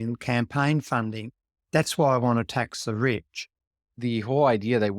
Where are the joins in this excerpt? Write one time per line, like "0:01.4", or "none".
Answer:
0:03.9